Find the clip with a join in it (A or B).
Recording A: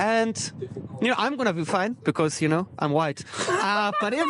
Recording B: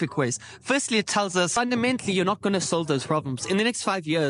B